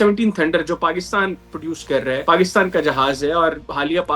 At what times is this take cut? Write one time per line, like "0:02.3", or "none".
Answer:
0:02.2